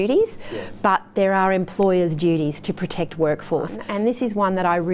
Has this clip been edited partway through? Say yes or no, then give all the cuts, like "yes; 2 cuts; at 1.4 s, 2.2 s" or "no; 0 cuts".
yes; 1 cut; at 3.8 s